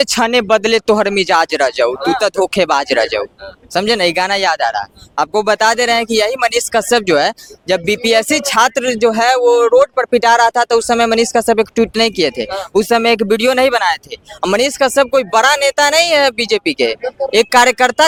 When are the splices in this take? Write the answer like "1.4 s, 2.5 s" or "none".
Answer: none